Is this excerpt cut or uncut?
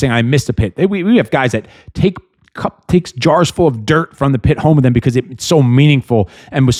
uncut